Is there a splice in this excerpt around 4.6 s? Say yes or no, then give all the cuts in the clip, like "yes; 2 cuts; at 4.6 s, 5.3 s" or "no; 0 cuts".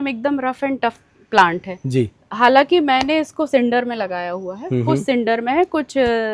no; 0 cuts